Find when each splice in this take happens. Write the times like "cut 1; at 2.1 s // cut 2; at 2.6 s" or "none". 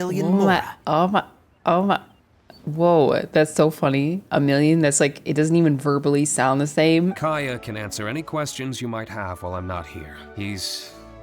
cut 1; at 7.2 s // cut 2; at 10.3 s